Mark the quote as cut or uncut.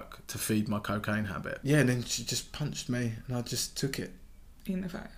cut